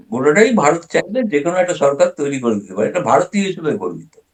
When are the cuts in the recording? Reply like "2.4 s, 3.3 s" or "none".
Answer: none